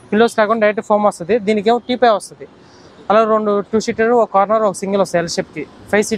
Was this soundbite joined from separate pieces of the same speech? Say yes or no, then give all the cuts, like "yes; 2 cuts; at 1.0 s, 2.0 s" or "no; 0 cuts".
no; 0 cuts